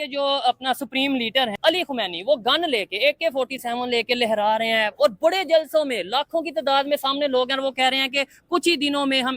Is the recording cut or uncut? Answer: cut